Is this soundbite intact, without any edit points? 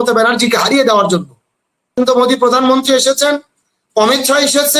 no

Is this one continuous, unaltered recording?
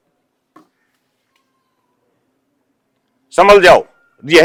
yes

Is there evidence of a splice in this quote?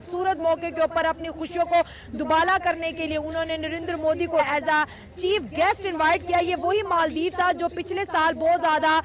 yes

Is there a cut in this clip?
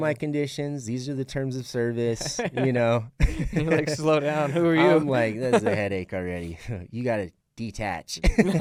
no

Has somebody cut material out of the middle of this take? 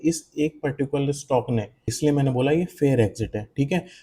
yes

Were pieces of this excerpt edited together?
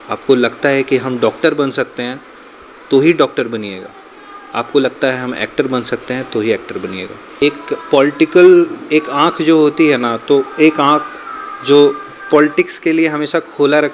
yes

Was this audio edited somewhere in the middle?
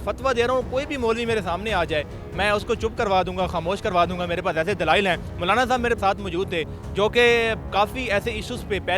no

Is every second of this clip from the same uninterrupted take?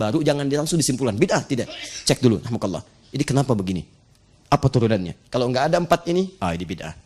yes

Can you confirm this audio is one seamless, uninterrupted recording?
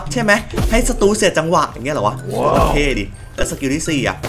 yes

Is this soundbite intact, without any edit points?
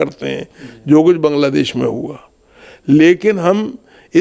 yes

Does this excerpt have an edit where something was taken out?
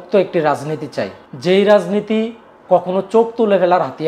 yes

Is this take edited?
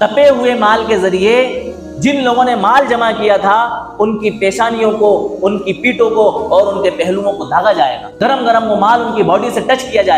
yes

